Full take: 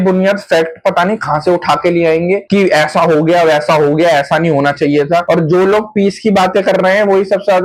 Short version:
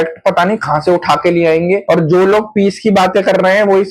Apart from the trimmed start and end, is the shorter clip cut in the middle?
yes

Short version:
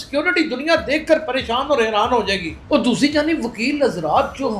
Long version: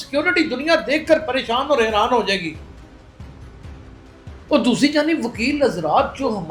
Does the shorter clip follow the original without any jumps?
no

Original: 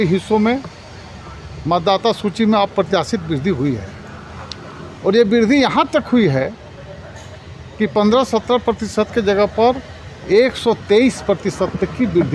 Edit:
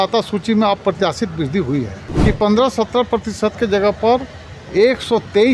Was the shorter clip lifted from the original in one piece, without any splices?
no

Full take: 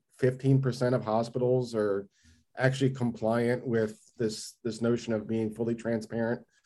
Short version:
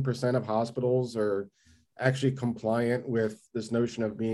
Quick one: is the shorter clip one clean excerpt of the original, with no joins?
no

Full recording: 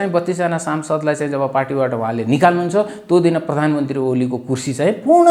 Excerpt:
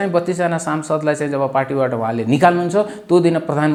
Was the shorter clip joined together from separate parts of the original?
no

